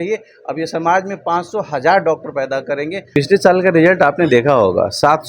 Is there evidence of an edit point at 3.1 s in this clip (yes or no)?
yes